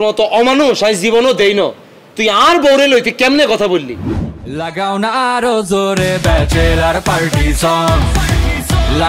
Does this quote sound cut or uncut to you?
cut